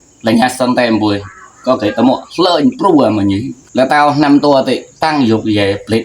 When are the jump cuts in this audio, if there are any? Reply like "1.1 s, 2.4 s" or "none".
3.5 s